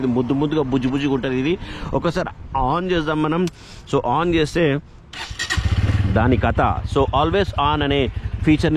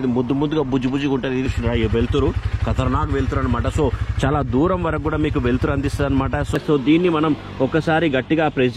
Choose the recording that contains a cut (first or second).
second